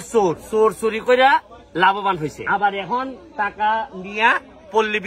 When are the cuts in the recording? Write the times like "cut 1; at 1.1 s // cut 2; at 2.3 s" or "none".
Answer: none